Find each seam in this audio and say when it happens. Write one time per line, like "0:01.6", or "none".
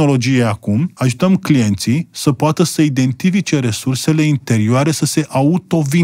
0:00.9